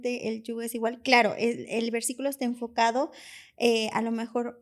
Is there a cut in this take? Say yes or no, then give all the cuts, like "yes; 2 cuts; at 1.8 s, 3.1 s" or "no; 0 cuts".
no; 0 cuts